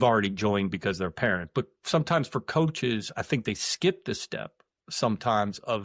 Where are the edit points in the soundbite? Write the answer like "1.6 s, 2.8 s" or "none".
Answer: none